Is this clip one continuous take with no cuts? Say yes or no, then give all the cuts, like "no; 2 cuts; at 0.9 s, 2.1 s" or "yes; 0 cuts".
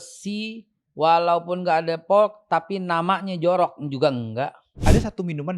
no; 1 cut; at 4.7 s